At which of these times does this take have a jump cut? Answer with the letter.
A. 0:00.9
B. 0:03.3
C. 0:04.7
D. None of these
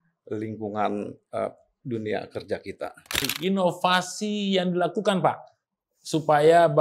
B